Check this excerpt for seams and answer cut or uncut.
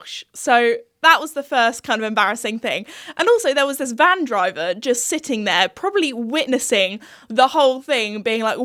uncut